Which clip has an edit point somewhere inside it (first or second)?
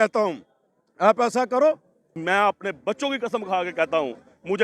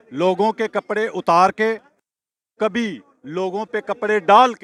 first